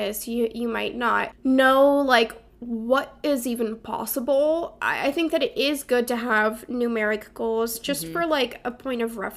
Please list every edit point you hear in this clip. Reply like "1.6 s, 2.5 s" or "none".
1.3 s, 4.8 s